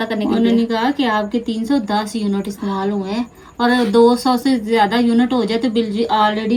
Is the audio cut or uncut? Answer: uncut